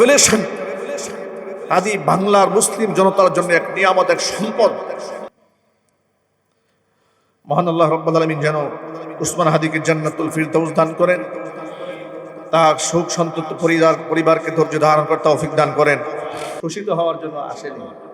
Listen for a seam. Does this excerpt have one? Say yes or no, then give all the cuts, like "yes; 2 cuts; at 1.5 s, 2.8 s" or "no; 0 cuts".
no; 0 cuts